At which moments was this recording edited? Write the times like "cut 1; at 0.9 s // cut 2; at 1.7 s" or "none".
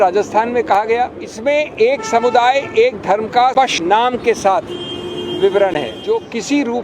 cut 1; at 1.2 s // cut 2; at 3.7 s // cut 3; at 6.0 s